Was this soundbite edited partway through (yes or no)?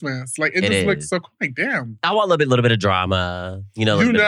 yes